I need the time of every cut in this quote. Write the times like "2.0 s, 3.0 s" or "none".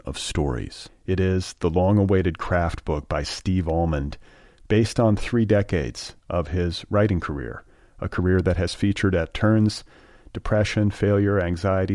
none